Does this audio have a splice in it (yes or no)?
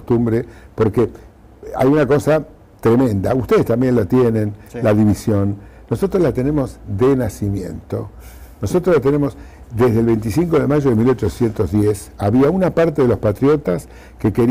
no